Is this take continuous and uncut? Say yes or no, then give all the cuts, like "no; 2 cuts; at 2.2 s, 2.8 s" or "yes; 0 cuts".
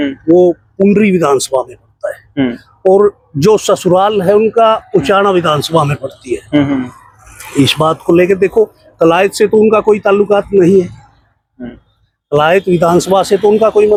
yes; 0 cuts